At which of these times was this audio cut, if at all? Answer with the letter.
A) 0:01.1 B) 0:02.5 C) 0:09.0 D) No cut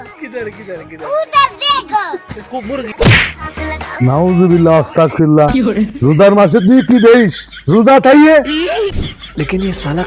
C